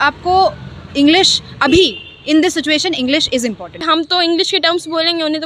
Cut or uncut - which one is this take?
cut